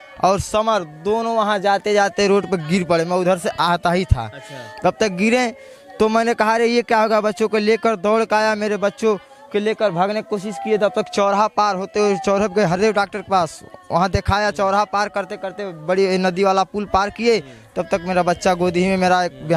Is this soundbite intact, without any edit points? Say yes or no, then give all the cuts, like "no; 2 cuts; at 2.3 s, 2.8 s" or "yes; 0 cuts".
yes; 0 cuts